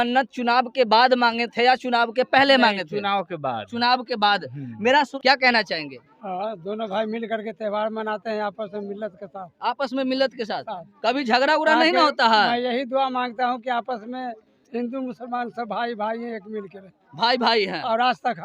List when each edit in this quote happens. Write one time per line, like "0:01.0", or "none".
0:05.1